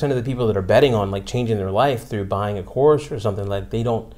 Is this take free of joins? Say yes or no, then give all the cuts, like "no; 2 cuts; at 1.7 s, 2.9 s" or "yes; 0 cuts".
yes; 0 cuts